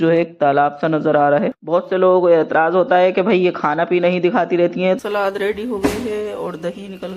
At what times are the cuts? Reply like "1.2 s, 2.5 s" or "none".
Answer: 1.6 s, 5.0 s